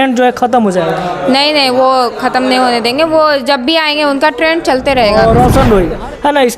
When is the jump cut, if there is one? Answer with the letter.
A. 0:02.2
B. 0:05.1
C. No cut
B